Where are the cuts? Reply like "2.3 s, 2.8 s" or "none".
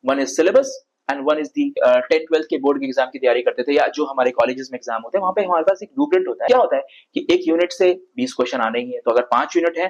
1.8 s, 6.5 s